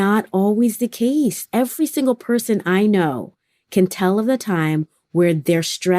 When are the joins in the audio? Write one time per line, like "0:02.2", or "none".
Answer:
0:01.4

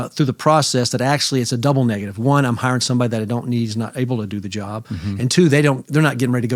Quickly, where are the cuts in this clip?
none

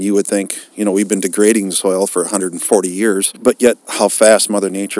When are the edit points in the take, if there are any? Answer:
0:03.5

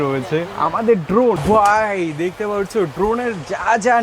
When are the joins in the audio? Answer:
0:01.4

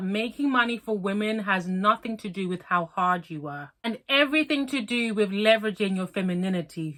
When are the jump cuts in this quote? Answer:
none

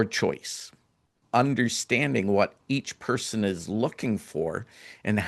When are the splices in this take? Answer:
0:01.2

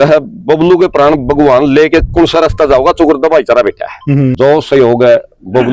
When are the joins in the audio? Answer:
0:04.3

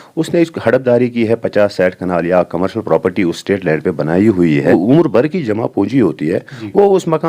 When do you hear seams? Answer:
0:04.7

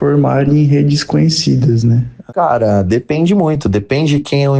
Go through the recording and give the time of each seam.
0:02.1

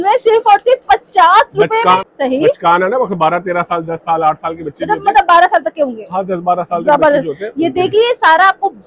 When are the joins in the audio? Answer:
none

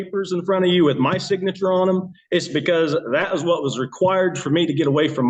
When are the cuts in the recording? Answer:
none

